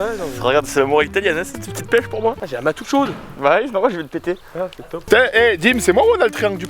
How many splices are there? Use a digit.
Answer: 0